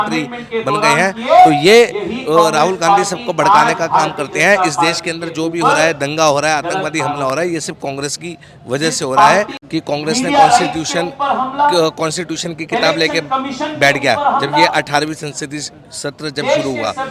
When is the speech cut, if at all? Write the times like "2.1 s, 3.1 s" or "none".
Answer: 9.6 s

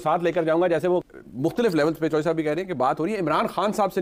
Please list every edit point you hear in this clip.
1.0 s

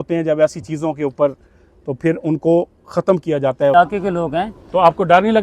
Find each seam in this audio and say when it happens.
3.7 s

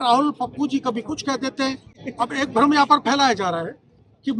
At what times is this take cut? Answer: none

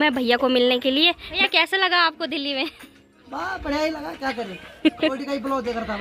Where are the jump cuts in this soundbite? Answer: 1.4 s, 5.1 s

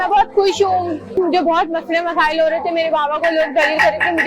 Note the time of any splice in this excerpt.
1.2 s

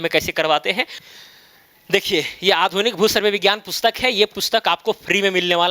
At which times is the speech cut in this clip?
1.0 s

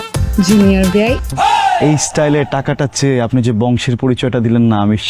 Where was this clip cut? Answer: 1.2 s

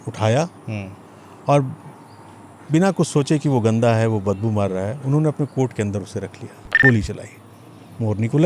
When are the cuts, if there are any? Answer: 6.8 s

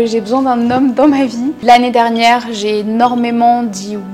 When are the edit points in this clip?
1.6 s

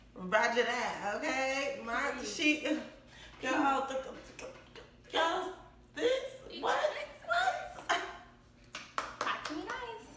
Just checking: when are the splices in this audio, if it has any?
none

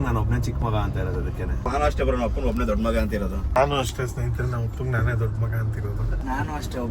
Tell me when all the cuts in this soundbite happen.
1.7 s, 3.6 s, 6.2 s

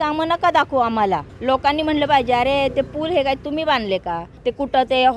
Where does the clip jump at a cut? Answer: 1.3 s, 4.3 s

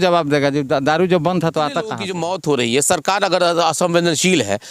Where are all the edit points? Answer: 2.1 s

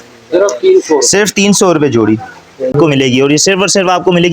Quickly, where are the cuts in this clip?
2.7 s

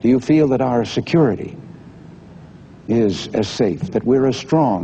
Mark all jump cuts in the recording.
none

